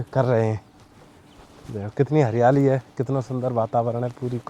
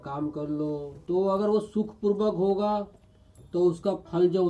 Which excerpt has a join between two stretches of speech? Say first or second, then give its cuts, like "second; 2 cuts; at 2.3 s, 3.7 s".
second; 2 cuts; at 0.9 s, 3.4 s